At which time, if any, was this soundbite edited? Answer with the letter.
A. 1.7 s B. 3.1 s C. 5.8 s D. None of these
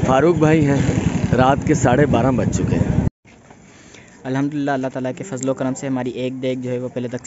B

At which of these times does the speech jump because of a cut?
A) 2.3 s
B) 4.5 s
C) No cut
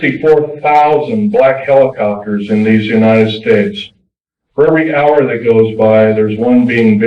C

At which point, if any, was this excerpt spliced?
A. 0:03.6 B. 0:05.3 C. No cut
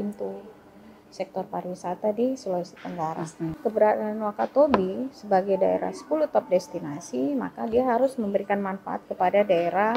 A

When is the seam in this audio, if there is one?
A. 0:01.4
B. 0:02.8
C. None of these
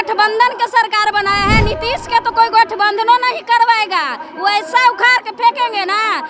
C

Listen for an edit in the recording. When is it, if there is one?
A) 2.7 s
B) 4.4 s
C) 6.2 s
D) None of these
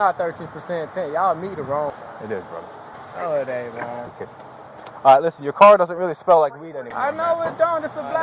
D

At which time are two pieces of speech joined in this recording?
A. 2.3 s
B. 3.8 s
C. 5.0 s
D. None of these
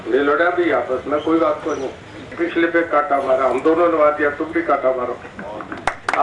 A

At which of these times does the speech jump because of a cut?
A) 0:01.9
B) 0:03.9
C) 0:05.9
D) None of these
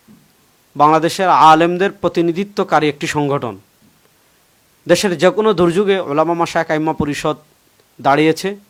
D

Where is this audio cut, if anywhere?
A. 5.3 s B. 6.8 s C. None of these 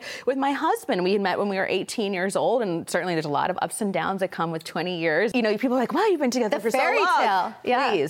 A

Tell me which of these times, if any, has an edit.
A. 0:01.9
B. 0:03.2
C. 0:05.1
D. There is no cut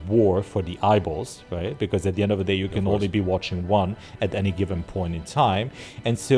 D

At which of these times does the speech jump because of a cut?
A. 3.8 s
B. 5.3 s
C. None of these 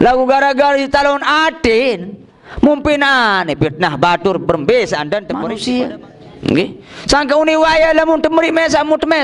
B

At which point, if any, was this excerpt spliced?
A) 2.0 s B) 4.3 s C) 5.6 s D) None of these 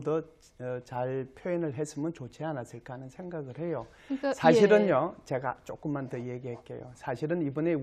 D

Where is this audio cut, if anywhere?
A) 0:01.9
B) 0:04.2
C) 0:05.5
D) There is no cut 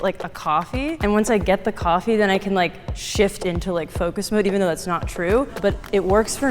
C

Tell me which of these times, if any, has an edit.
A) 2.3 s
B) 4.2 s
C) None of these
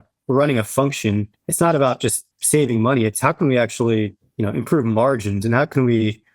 B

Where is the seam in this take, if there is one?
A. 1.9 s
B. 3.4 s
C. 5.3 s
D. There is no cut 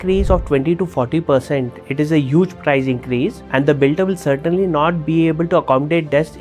B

